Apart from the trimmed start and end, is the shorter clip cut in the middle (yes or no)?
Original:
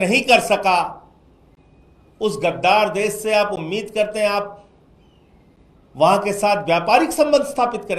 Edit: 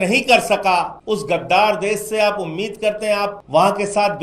yes